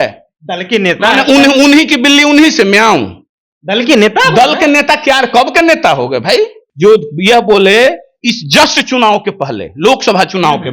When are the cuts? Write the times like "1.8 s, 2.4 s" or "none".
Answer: 6.6 s